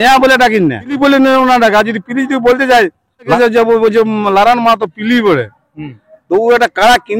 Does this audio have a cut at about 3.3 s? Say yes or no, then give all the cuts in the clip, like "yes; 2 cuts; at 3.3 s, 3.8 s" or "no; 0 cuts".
yes; 2 cuts; at 1.0 s, 3.3 s